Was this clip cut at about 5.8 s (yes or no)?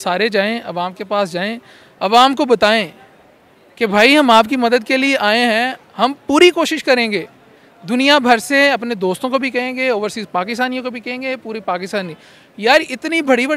no